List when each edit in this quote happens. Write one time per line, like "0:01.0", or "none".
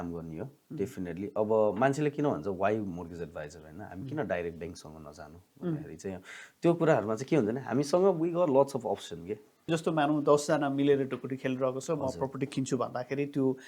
0:09.7